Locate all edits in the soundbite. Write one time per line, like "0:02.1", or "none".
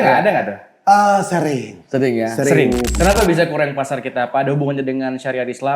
0:02.9